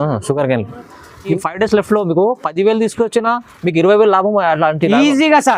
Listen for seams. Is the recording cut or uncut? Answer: cut